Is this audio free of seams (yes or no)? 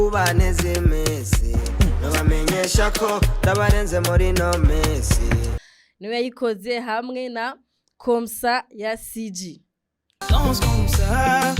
no